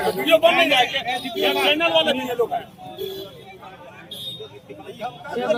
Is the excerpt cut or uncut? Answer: uncut